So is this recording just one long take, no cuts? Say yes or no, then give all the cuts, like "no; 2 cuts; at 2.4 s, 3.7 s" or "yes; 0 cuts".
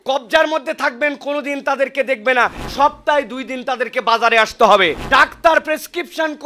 no; 2 cuts; at 2.6 s, 5.0 s